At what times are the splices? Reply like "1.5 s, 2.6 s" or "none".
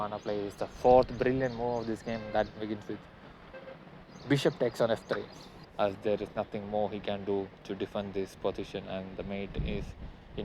5.6 s